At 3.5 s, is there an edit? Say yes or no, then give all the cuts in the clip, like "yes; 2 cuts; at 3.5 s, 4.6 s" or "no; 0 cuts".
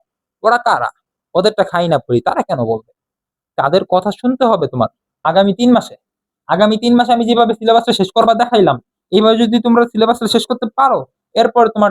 no; 1 cut; at 5.2 s